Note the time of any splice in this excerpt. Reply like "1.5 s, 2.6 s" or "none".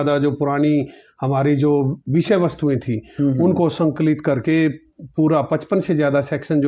none